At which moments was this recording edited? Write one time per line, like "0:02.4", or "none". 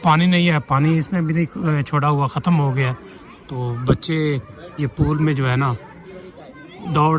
none